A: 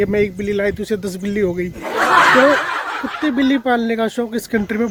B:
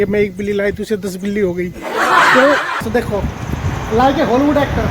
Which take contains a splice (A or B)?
B